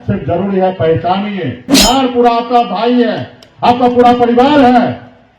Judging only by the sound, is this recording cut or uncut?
cut